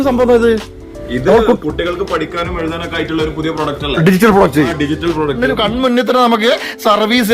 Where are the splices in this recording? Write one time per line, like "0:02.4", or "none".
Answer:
0:05.5